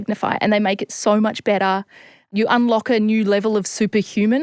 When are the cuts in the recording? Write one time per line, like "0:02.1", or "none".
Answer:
0:02.3